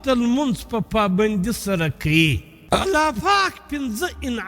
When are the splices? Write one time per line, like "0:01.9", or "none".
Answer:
0:02.5